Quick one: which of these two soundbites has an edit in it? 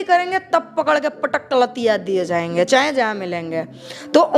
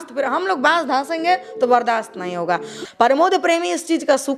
second; 1 cut; at 2.8 s

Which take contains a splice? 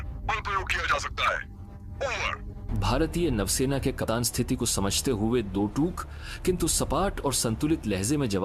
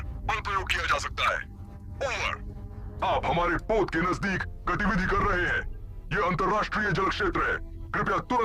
second; 1 cut; at 2.7 s

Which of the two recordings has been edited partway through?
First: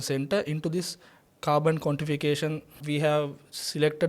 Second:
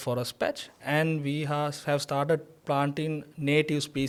first; 1 cut; at 2.8 s

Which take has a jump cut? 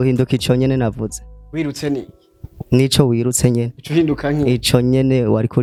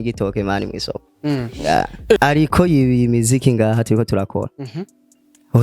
second; 1 cut; at 2.2 s

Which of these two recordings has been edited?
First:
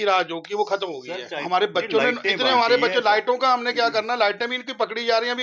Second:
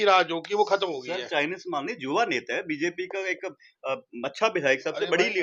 first; 1 cut; at 1.3 s

